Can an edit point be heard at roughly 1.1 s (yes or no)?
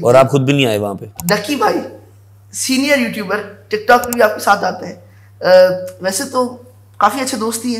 yes